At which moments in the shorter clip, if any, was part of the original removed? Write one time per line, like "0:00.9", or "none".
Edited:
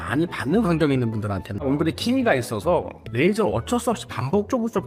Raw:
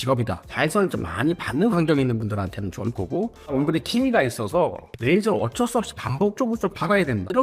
0:01.5